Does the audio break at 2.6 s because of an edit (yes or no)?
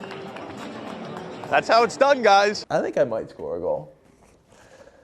yes